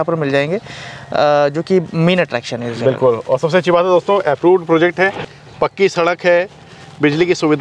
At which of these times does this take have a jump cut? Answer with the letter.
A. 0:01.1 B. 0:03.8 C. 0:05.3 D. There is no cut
C